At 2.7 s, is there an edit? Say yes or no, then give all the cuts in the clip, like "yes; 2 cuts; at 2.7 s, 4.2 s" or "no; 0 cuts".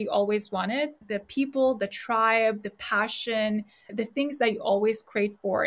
no; 2 cuts; at 1.0 s, 3.9 s